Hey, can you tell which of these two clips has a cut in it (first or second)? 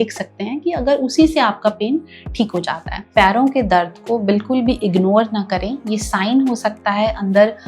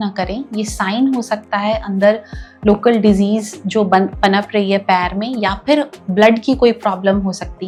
first